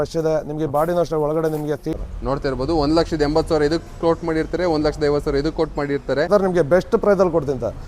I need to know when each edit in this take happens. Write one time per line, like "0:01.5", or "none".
0:01.8
0:06.3